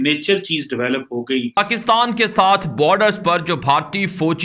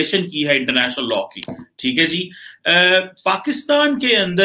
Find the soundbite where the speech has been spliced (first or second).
first